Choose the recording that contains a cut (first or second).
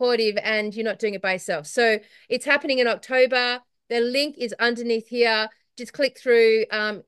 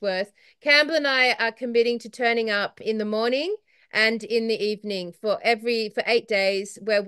second